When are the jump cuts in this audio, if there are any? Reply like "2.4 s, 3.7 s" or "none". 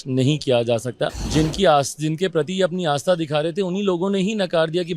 1.1 s